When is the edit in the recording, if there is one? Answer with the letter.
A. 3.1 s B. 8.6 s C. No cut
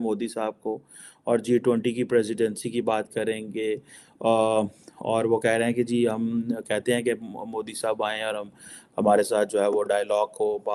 C